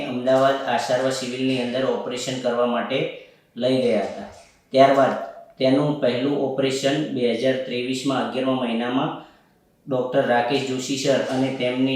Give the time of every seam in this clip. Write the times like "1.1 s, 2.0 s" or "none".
none